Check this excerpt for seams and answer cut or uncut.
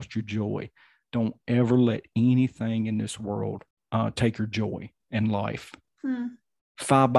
cut